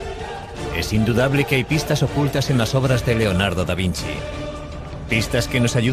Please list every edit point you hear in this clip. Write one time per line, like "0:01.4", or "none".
0:01.3